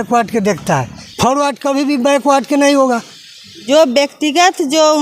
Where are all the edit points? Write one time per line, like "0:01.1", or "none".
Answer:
0:01.0
0:03.6